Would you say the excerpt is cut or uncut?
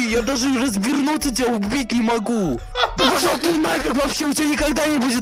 cut